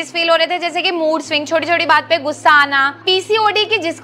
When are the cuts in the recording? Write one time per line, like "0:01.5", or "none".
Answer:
0:03.0